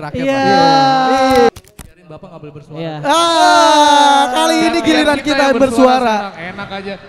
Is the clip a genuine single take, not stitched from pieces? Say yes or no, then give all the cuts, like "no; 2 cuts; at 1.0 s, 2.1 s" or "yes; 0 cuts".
no; 1 cut; at 1.5 s